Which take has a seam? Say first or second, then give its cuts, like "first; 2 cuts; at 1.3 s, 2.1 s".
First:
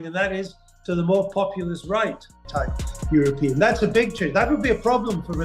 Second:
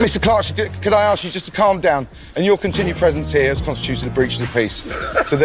first; 1 cut; at 2.3 s